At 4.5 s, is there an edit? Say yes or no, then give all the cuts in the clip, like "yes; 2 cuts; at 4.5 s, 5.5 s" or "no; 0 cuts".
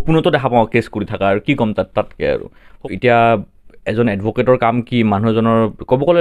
no; 1 cut; at 2.7 s